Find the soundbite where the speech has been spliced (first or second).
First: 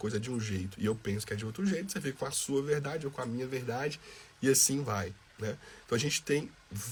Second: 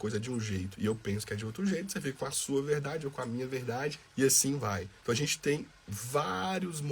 second